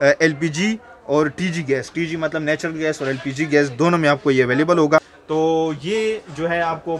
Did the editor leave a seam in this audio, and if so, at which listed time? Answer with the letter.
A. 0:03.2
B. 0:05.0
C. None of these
B